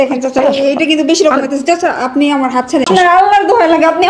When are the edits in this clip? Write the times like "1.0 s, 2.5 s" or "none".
2.9 s